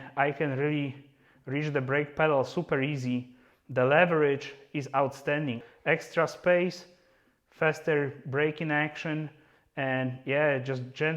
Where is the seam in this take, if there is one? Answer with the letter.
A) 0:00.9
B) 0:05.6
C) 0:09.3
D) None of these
B